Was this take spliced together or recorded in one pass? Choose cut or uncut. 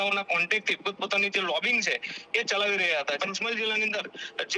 cut